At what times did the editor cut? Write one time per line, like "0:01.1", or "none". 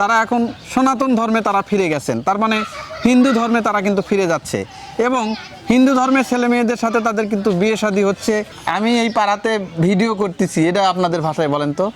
0:08.6